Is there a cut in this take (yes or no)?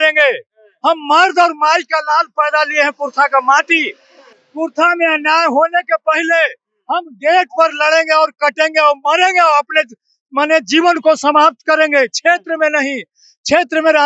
no